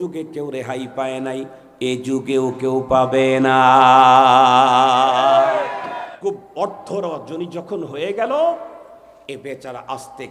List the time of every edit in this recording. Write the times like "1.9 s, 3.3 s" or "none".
6.0 s